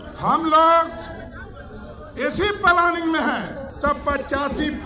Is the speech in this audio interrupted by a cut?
yes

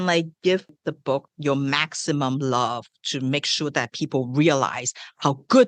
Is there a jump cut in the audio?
yes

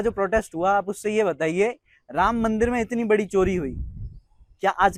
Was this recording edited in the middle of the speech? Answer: no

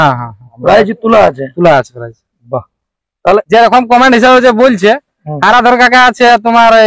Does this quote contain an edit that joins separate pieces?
yes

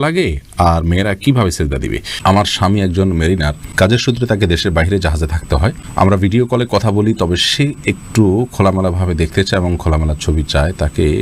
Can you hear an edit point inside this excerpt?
yes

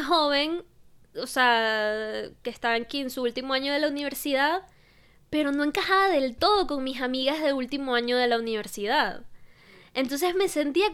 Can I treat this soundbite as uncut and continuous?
yes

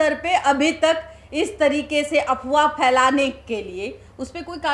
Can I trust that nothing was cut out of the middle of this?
yes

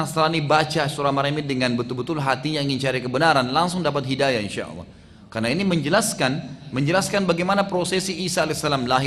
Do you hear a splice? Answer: no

